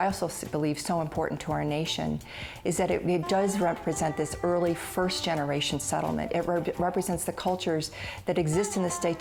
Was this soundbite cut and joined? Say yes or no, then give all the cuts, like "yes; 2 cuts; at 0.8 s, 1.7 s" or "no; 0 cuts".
no; 0 cuts